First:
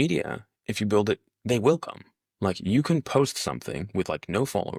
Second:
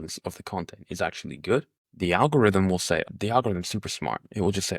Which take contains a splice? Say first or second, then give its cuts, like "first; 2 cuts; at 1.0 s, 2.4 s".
second; 2 cuts; at 1.8 s, 3.0 s